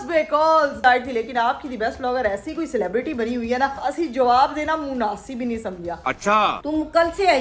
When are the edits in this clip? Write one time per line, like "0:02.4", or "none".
0:00.8
0:03.8
0:06.5